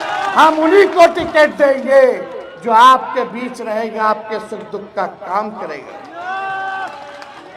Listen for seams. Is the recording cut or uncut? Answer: uncut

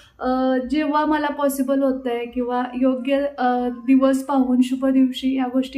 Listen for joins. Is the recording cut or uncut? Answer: uncut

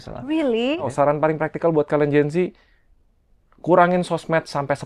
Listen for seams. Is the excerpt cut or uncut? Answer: cut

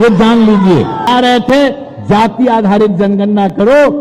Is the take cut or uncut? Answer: cut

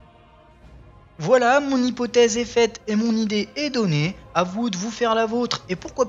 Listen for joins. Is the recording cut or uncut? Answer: cut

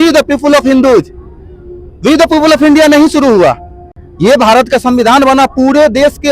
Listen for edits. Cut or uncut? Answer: uncut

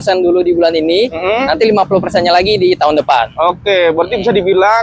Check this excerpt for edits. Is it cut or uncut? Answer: uncut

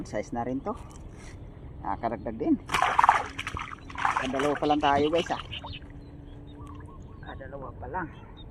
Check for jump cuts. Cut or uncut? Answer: uncut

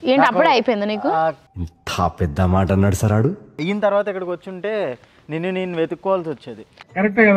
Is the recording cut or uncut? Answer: cut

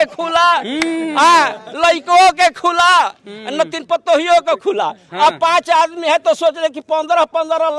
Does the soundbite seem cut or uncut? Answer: uncut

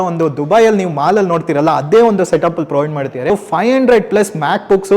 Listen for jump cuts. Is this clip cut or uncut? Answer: cut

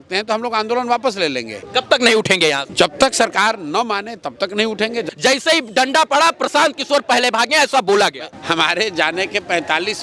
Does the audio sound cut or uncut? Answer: cut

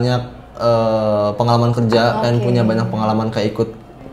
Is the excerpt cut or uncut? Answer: uncut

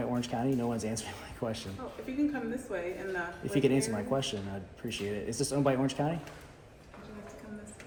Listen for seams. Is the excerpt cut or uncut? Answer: uncut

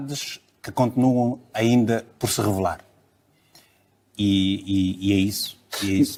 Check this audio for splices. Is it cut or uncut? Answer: uncut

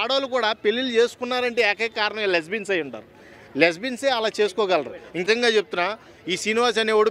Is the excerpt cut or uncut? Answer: cut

